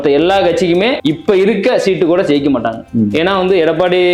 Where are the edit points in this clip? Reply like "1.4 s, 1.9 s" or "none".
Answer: 1.0 s